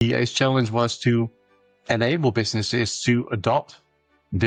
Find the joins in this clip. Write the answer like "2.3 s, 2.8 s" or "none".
none